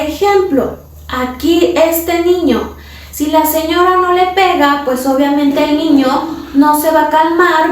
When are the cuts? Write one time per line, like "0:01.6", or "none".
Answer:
none